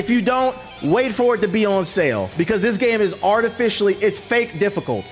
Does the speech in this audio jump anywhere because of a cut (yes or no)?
yes